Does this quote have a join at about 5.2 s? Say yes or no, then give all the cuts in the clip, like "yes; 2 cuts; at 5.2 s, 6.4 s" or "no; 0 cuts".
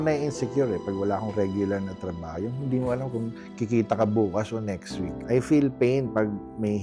yes; 1 cut; at 5.2 s